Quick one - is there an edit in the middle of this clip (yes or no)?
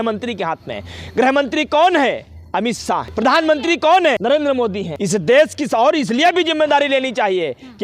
yes